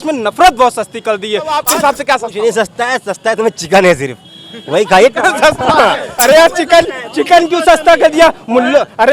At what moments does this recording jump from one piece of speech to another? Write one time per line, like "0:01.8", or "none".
0:01.6
0:06.1